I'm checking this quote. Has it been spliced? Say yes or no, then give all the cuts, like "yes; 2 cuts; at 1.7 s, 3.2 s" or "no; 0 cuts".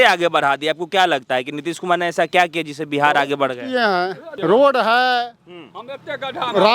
yes; 1 cut; at 4.2 s